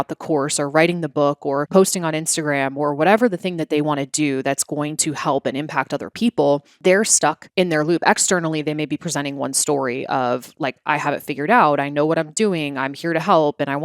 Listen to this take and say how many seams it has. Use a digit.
1